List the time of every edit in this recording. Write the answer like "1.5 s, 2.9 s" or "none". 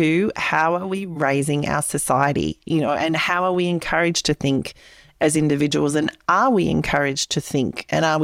none

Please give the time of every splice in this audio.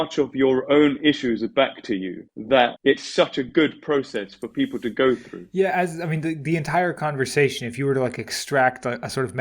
5.4 s

